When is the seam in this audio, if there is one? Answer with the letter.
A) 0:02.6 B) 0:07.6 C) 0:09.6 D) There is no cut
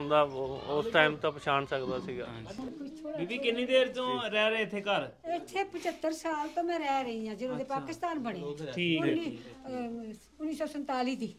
A